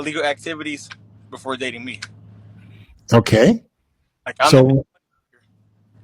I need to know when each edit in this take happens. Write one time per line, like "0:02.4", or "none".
0:02.6